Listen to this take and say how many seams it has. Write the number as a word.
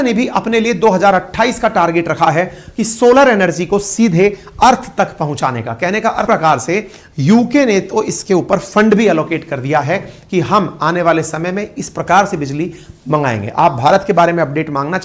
one